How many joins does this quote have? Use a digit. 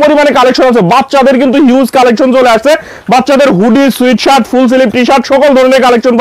0